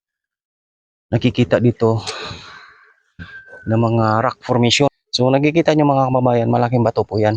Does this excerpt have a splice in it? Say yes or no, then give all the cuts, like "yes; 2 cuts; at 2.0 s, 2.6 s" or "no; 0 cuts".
yes; 1 cut; at 4.9 s